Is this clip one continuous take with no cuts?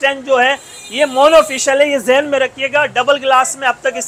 yes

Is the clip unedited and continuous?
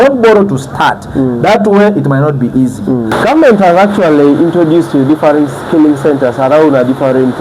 no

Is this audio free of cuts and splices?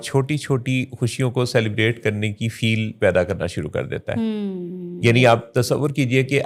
yes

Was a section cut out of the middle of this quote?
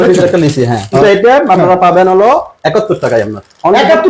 yes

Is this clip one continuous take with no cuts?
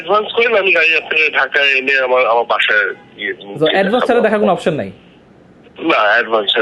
yes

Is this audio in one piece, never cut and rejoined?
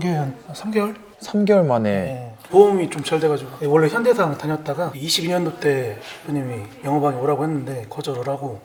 yes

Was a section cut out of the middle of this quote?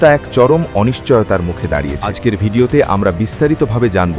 yes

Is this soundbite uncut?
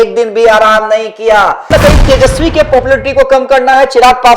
no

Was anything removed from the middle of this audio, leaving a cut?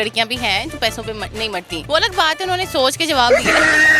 yes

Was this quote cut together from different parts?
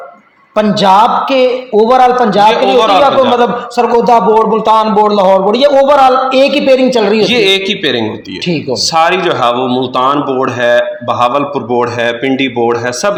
no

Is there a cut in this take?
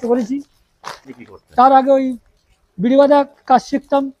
yes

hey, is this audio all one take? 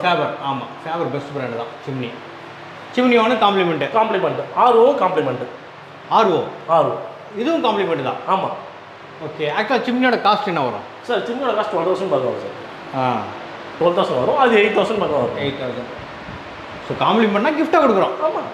yes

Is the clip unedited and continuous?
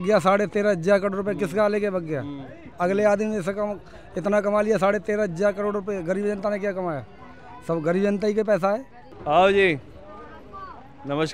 yes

